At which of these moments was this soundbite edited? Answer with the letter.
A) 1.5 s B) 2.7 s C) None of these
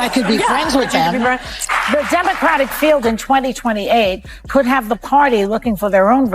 A